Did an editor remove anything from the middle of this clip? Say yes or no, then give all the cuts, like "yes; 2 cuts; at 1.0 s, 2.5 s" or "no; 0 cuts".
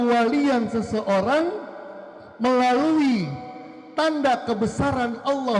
no; 0 cuts